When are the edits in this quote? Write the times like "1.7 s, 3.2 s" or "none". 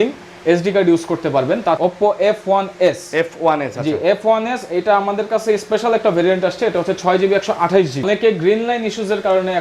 1.8 s, 8.1 s